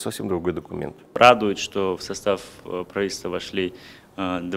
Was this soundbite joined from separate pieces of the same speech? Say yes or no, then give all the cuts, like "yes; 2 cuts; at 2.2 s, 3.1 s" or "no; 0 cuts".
yes; 1 cut; at 1.0 s